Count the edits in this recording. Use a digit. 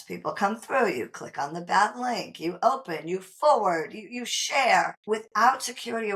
1